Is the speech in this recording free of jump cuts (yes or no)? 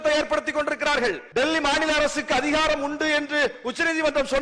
no